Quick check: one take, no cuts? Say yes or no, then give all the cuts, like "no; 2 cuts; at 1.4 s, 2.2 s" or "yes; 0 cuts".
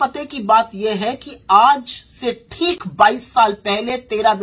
yes; 0 cuts